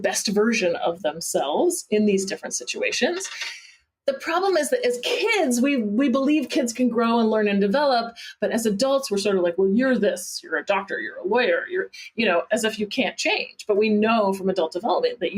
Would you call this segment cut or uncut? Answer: uncut